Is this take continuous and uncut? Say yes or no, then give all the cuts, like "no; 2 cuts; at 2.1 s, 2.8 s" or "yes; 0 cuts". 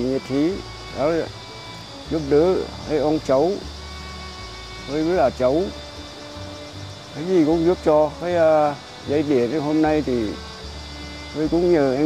yes; 0 cuts